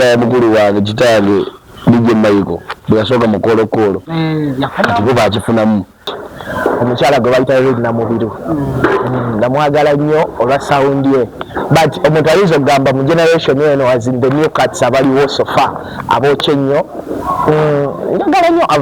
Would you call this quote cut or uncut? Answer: cut